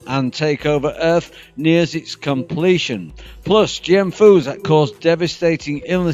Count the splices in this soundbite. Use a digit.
1